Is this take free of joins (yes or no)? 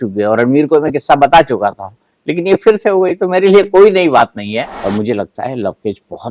no